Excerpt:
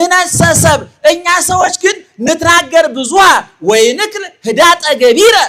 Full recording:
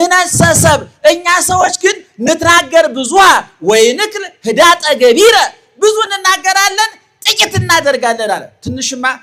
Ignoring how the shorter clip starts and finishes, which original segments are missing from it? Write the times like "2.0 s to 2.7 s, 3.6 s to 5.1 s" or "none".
none